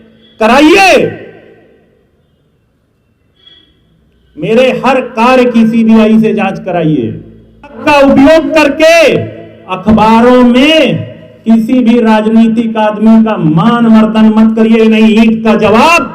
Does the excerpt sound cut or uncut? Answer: cut